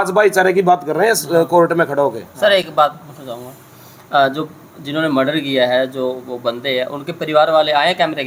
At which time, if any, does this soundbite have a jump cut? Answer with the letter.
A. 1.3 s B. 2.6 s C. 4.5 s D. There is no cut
D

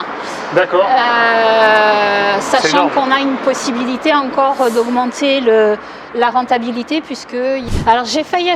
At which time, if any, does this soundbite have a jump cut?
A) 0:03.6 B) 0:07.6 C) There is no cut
B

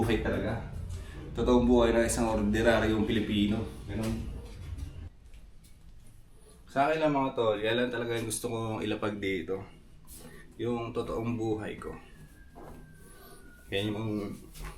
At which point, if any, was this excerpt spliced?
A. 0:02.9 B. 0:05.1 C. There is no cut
B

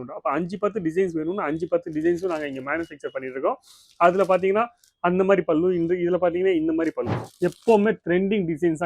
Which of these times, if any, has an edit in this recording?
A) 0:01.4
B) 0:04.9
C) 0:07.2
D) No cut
C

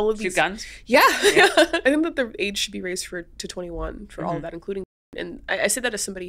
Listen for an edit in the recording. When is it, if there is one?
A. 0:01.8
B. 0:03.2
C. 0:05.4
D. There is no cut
A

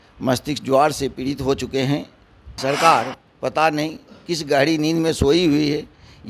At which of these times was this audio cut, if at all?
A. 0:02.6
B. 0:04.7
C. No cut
A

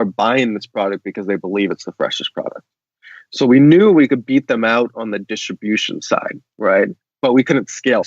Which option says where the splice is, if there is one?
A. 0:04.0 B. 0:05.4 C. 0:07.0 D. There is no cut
C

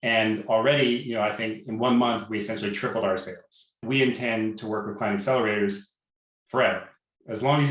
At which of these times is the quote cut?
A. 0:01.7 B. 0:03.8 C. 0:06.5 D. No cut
B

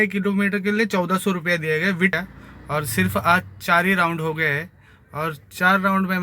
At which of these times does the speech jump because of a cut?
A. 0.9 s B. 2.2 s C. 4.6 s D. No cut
B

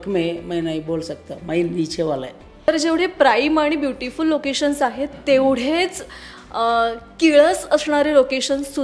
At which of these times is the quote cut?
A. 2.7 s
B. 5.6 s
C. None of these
A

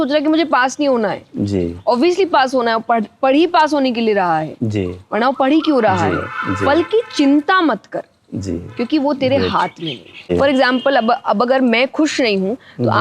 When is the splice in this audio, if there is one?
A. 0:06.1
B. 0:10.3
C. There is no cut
B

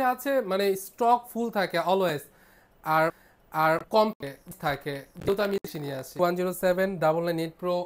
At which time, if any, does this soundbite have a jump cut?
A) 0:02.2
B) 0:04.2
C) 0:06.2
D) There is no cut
C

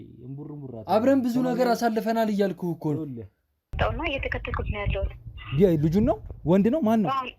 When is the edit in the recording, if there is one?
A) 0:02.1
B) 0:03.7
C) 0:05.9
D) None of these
B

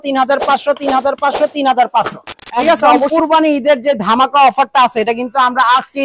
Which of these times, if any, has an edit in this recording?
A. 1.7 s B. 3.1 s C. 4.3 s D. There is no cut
B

